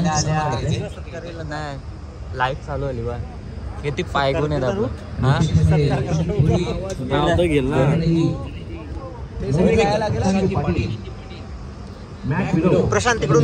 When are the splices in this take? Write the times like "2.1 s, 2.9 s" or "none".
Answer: none

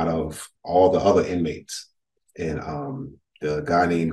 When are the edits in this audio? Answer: none

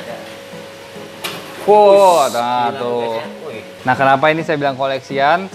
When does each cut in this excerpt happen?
3.7 s

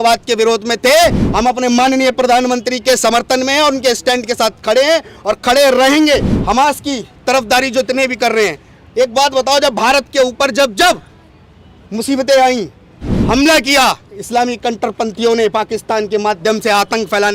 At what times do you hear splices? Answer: 6.3 s

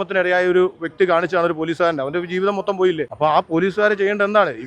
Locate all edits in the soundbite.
3.1 s

